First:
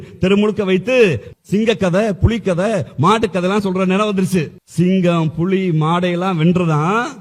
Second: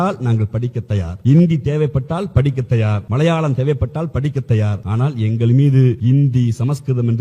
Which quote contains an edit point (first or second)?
second